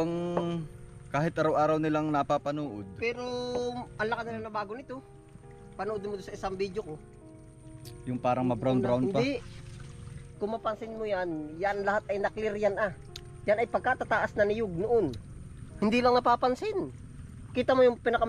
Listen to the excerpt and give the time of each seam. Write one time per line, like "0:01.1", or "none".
none